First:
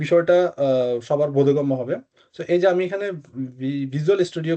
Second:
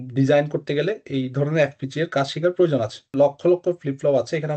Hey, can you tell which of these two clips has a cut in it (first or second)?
second